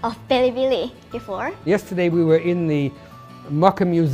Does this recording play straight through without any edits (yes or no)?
no